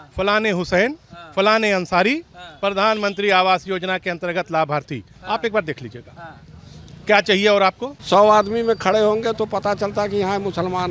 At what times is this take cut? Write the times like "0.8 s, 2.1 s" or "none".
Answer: 7.9 s